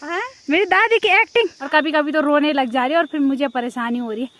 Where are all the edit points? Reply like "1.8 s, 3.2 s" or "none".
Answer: 1.6 s